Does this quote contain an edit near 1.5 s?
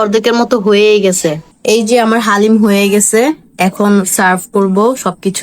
yes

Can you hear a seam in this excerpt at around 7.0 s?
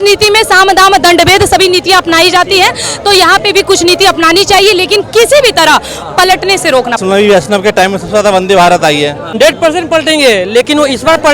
yes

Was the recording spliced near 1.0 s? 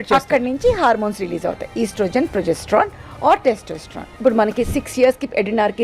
no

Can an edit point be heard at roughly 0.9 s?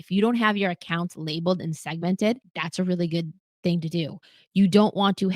no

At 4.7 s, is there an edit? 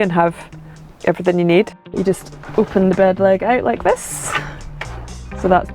no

